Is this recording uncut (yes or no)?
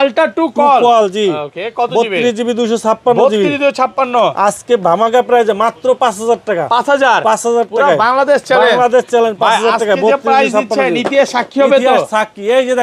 yes